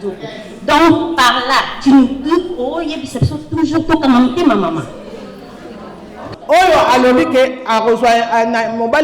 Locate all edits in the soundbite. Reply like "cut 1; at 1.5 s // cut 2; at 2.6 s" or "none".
cut 1; at 6.3 s